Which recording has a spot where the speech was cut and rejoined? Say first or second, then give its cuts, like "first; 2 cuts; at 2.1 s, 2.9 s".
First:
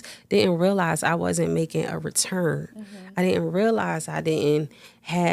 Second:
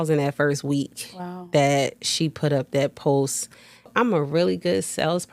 second; 1 cut; at 3.9 s